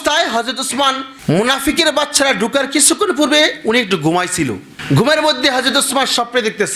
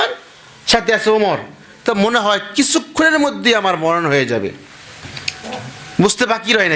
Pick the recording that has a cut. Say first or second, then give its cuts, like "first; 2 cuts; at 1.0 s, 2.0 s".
first; 1 cut; at 1.1 s